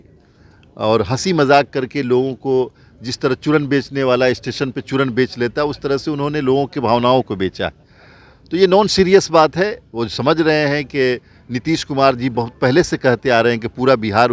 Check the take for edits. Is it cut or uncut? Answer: uncut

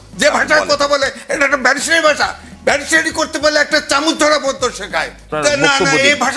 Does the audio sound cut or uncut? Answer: cut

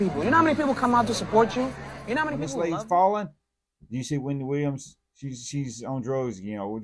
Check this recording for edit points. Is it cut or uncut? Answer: cut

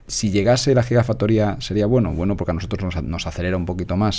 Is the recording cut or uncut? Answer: uncut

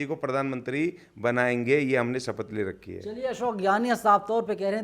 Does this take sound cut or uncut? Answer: uncut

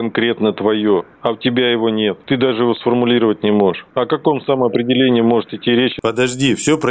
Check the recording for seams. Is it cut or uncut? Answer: cut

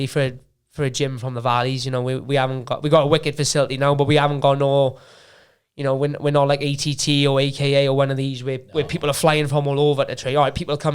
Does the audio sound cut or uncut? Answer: uncut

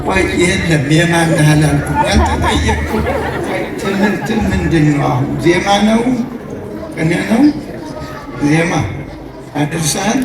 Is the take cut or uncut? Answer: uncut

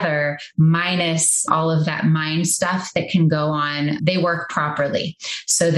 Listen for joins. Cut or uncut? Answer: cut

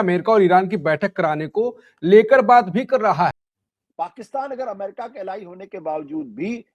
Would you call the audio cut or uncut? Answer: cut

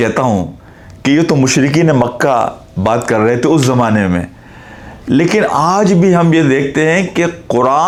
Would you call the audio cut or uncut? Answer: uncut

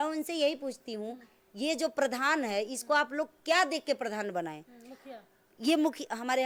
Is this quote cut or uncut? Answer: uncut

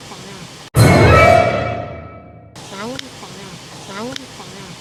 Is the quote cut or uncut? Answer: uncut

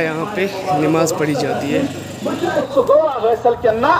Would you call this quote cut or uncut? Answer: cut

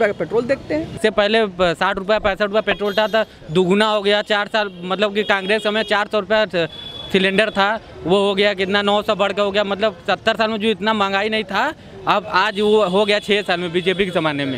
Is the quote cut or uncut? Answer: cut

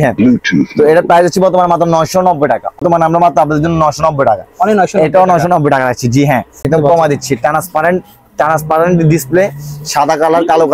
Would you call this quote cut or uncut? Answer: cut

